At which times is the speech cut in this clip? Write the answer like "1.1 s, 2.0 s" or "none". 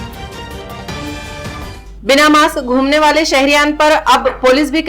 1.1 s